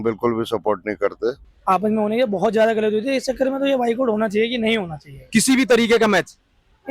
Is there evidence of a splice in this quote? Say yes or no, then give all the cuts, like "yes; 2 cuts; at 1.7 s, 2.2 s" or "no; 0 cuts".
yes; 1 cut; at 1.5 s